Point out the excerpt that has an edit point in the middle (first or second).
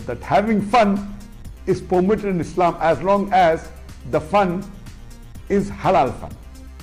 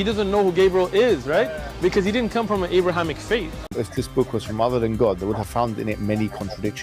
second